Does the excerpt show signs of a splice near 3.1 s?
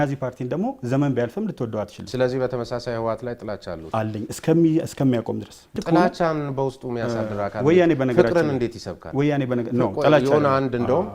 no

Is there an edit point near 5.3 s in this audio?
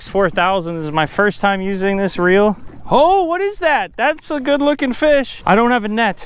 yes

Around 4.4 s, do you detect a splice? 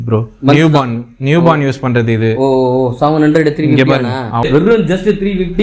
yes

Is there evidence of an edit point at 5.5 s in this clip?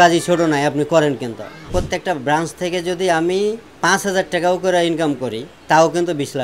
yes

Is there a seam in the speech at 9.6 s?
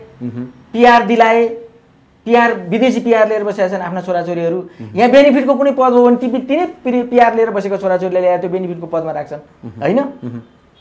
no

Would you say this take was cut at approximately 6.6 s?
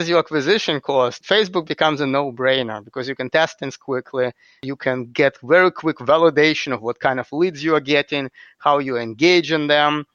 no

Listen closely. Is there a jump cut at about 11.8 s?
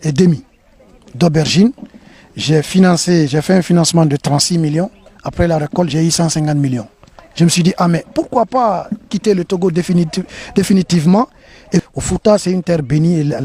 yes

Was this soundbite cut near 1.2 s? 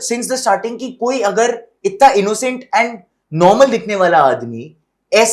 no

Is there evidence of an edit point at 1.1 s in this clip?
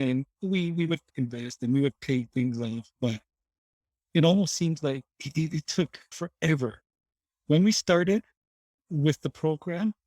yes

